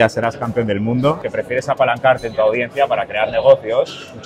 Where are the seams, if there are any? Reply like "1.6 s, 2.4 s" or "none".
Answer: 1.2 s